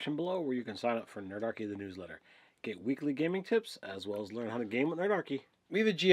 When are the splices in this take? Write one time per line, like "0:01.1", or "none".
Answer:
0:01.7